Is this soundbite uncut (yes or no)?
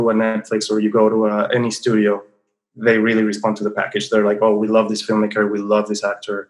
yes